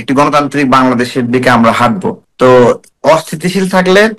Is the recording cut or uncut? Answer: cut